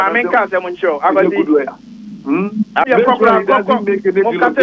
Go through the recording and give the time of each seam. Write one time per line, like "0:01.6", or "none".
0:02.8